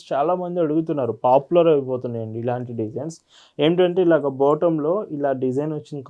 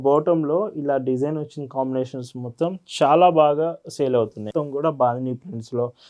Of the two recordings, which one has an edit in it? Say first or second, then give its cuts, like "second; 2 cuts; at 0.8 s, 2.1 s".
second; 1 cut; at 4.4 s